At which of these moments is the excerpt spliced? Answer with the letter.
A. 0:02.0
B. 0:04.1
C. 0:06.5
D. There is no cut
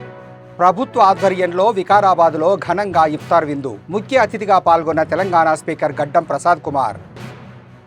D